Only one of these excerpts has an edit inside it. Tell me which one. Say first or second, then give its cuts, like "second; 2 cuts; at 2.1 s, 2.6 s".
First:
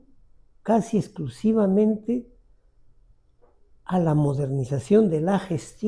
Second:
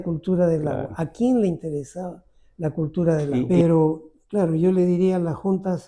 second; 1 cut; at 3.5 s